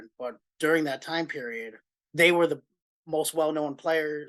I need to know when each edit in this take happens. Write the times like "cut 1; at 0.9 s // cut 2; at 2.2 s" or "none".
none